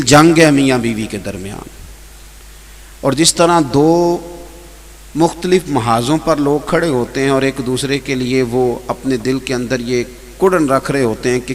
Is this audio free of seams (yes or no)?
yes